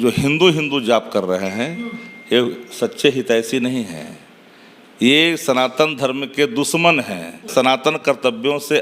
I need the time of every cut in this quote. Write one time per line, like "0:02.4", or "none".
0:07.5